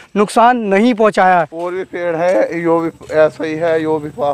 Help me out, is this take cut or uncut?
cut